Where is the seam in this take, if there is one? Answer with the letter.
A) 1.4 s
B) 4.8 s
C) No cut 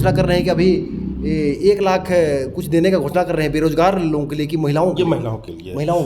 C